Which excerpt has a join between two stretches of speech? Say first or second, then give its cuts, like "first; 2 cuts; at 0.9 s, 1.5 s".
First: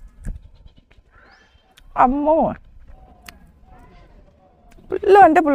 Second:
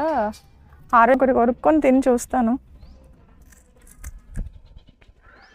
second; 1 cut; at 1.1 s